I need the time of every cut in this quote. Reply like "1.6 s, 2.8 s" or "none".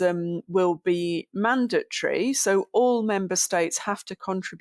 none